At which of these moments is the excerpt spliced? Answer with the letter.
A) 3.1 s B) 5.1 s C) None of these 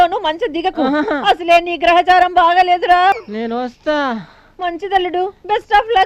A